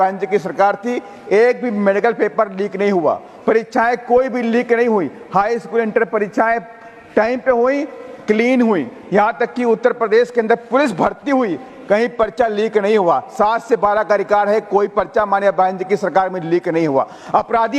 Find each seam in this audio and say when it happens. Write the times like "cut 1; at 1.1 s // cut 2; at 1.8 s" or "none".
none